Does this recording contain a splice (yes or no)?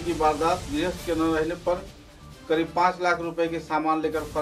no